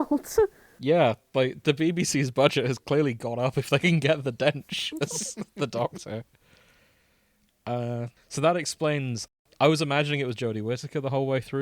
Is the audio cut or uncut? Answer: cut